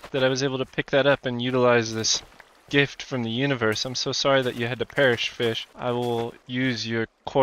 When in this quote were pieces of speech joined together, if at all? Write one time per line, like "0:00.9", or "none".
0:05.7
0:06.4